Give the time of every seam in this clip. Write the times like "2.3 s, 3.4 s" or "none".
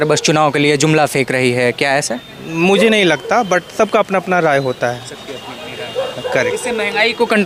none